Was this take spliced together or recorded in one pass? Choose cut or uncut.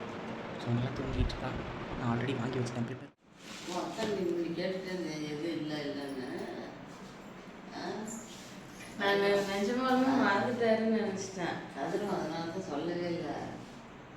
cut